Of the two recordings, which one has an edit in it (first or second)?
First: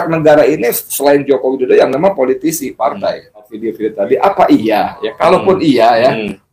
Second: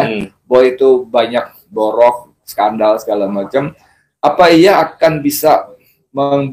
first